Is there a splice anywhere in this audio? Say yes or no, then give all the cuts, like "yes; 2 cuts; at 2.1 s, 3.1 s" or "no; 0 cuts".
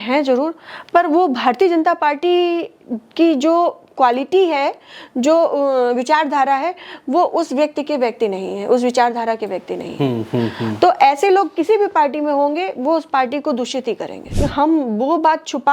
yes; 1 cut; at 14.3 s